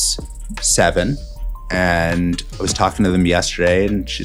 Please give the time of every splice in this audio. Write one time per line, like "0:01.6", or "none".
none